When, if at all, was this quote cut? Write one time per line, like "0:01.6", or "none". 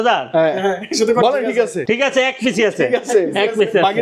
0:01.8